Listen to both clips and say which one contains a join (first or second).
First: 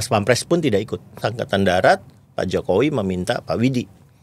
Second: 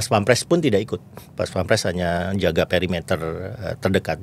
first